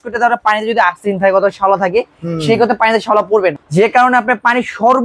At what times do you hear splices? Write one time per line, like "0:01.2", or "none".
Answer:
0:03.6